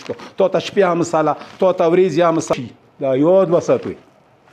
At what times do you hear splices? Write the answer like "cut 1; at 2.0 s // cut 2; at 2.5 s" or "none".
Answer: cut 1; at 2.5 s